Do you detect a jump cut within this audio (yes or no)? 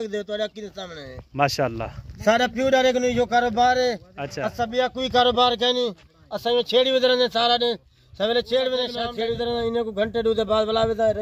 yes